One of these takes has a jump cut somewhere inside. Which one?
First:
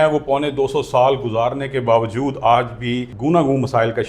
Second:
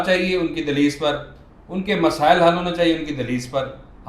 first; 1 cut; at 3.1 s

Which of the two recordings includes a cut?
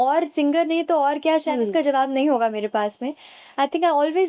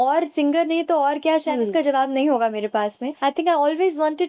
second; 1 cut; at 3.1 s

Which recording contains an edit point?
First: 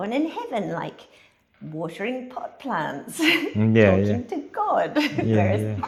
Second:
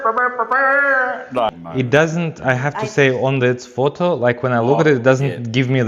second; 1 cut; at 1.5 s

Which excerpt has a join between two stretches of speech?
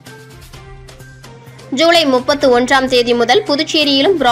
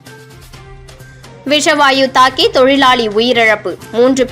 first; 1 cut; at 0.9 s

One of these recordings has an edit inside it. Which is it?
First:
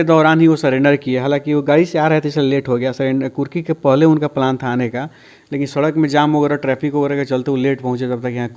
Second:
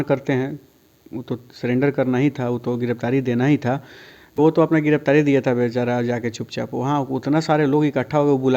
second; 1 cut; at 4.3 s

